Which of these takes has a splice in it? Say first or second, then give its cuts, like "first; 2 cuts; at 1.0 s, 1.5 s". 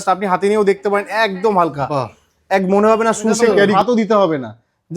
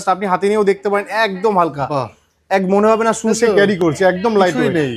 first; 1 cut; at 3.7 s